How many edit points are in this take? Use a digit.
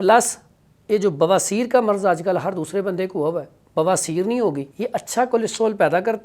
1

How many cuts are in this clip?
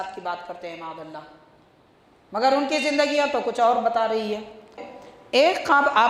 1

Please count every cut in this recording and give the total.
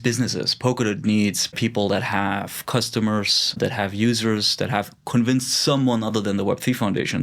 2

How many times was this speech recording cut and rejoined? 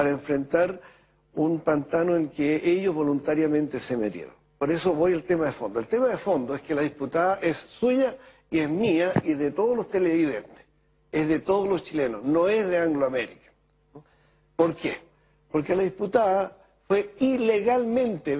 1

